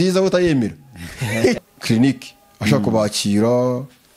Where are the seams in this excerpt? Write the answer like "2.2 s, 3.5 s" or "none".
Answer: 1.6 s